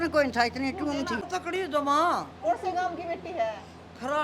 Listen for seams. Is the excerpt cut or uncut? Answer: cut